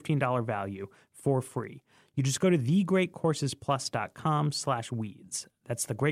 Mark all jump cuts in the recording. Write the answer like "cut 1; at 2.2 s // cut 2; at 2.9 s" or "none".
none